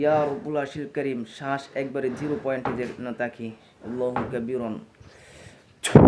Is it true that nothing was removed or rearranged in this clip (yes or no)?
no